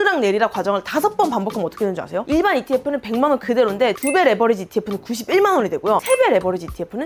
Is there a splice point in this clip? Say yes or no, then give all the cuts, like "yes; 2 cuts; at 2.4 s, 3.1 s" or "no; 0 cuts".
no; 0 cuts